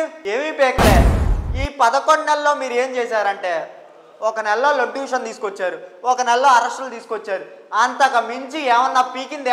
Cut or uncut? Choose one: cut